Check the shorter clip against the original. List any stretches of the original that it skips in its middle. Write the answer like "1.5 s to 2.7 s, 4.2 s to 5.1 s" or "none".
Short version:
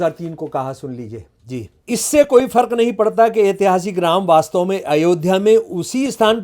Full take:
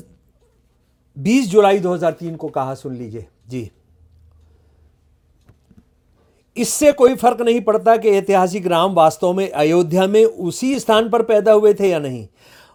3.8 s to 6.4 s